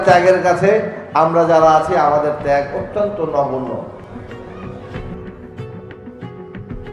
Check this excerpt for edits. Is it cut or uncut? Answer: uncut